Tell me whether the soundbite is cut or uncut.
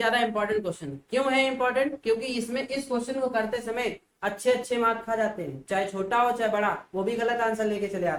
uncut